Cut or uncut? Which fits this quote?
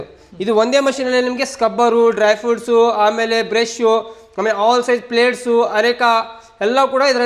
uncut